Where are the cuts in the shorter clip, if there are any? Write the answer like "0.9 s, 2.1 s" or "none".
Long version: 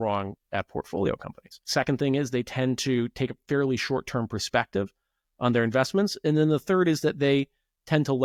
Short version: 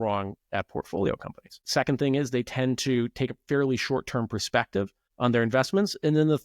5.0 s